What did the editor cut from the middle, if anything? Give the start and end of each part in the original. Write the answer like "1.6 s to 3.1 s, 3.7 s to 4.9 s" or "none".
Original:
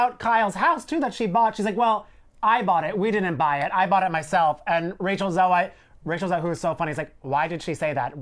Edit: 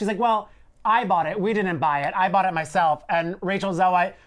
none